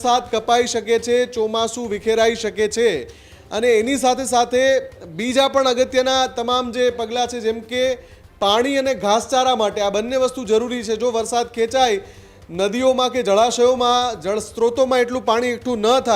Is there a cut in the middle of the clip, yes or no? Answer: no